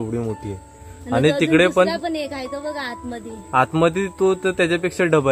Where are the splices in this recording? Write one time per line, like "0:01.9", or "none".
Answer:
none